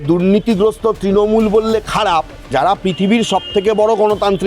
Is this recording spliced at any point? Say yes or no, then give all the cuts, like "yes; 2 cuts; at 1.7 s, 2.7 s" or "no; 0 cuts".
yes; 1 cut; at 2.5 s